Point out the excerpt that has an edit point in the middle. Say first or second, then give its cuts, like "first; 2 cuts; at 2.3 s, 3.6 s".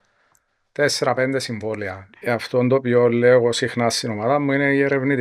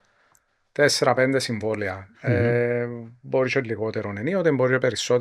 first; 1 cut; at 2.1 s